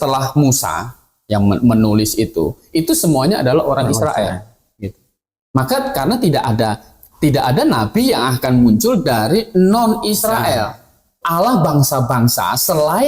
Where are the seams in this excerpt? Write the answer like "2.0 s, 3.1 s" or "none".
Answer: 11.2 s